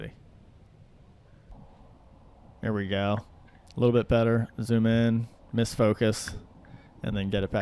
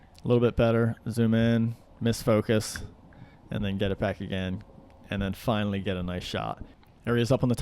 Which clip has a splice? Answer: second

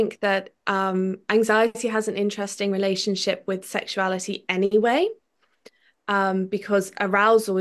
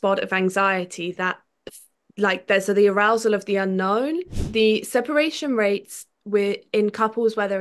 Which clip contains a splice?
second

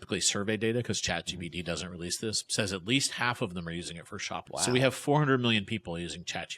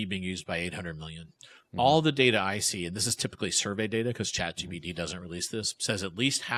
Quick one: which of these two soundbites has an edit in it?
first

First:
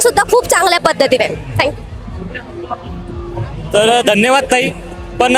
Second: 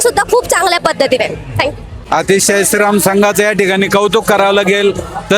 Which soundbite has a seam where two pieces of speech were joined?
second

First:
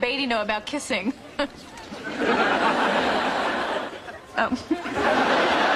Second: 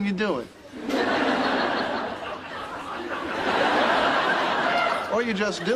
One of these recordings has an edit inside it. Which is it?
second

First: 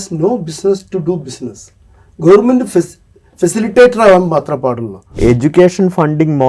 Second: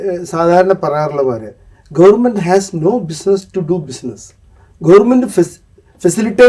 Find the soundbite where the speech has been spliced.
first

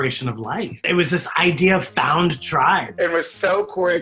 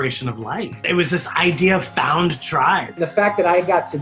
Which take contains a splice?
first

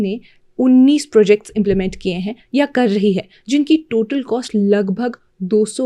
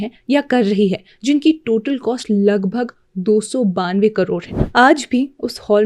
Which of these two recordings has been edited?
second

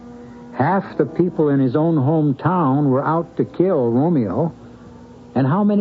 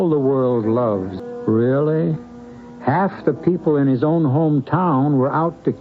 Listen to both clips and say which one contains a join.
second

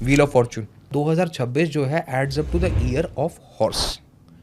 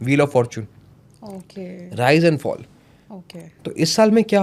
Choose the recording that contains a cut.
first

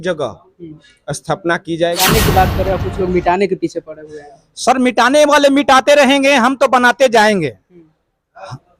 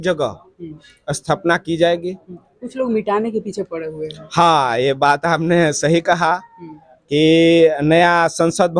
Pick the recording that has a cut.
first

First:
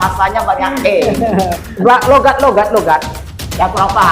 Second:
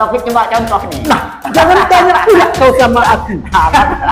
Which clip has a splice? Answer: first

